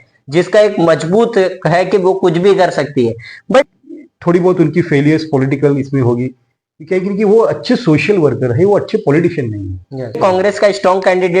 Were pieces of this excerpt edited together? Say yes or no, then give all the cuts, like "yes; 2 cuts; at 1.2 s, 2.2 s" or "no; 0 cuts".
yes; 2 cuts; at 3.6 s, 10.2 s